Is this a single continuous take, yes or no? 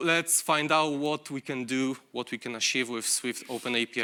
yes